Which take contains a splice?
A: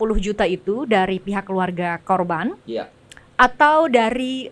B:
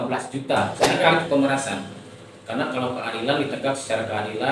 B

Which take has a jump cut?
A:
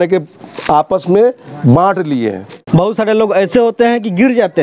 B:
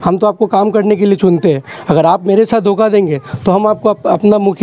A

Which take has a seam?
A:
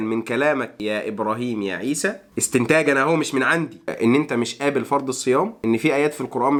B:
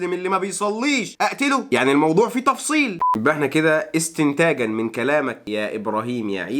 B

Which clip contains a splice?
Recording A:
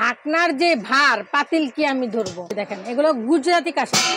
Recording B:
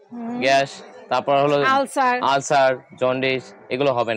A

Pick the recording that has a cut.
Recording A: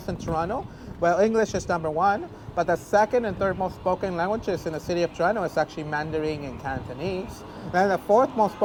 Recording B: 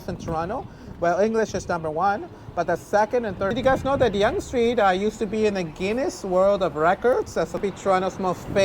B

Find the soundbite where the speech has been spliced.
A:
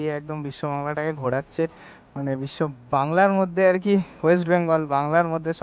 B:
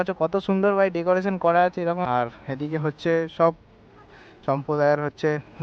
B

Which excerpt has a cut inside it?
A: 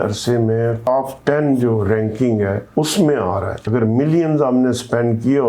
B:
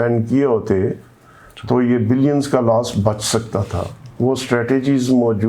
A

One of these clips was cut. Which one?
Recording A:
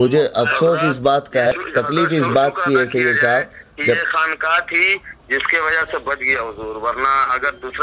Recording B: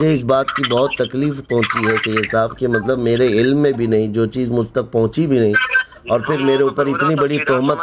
A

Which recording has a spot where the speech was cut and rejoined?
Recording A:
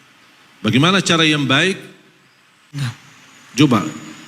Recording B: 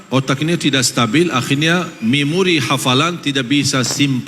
A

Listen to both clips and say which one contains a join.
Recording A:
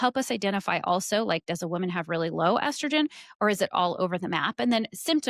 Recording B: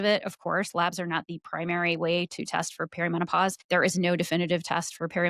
B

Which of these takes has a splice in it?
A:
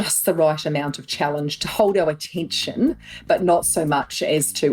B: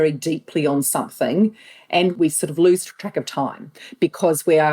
B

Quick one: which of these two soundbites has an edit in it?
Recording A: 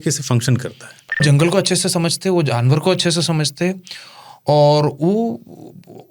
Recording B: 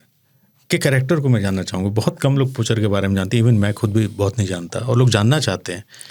A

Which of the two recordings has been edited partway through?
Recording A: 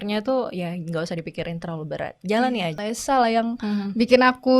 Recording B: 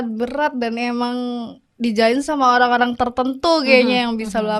A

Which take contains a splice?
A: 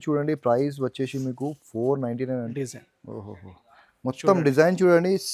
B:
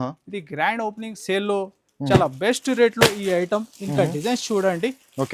A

